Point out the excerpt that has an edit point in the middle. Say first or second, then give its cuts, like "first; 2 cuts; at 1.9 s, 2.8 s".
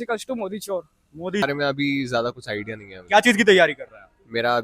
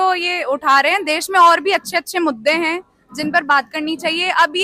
first; 1 cut; at 1.4 s